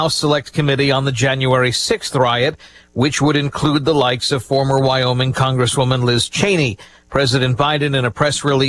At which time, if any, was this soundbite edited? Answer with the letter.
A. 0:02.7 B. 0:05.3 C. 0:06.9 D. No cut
C